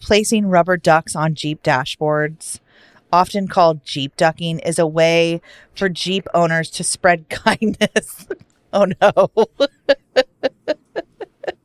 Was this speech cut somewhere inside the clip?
no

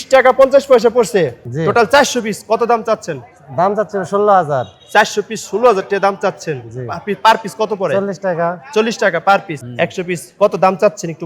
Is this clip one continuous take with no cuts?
no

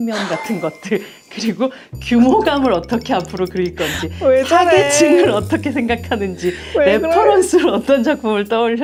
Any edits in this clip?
no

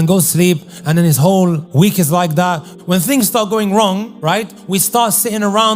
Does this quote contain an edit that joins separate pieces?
yes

